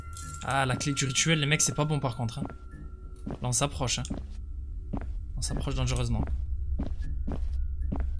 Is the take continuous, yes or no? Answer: yes